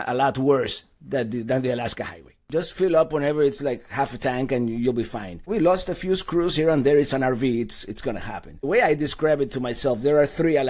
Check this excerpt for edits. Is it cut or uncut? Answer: cut